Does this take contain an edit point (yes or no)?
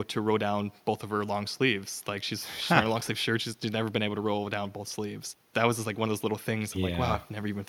no